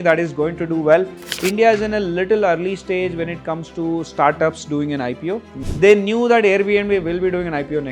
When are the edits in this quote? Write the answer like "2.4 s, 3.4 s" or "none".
1.2 s, 5.5 s